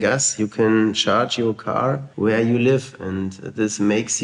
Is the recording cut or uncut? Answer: uncut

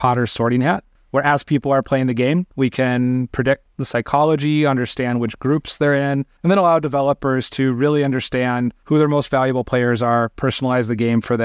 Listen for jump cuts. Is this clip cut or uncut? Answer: cut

